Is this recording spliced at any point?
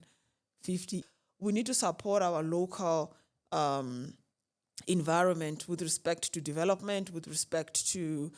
yes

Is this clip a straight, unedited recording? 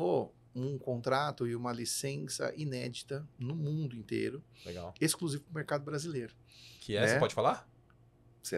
yes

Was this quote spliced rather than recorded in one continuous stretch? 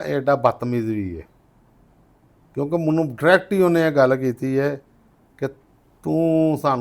no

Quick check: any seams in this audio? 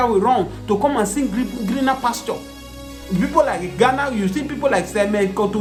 no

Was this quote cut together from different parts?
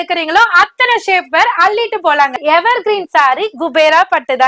yes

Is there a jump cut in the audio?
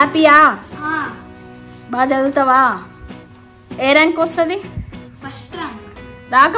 no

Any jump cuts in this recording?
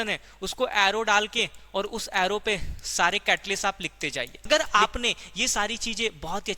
yes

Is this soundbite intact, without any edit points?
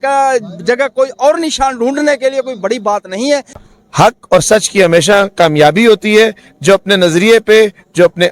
no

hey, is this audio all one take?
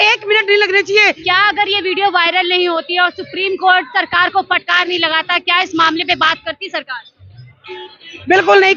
no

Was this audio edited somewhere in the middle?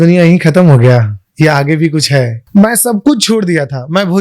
yes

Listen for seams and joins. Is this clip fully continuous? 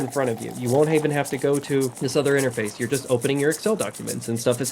no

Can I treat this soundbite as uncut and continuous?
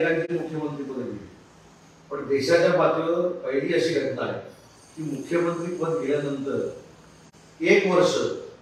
yes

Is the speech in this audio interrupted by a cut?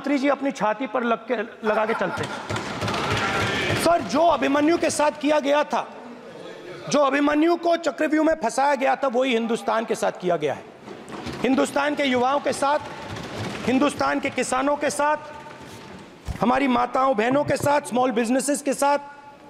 no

